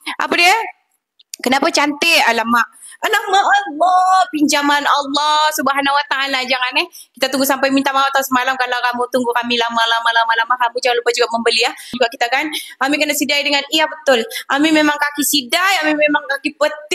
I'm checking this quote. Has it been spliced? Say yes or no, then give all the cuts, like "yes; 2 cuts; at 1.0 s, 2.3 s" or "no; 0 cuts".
yes; 1 cut; at 12.0 s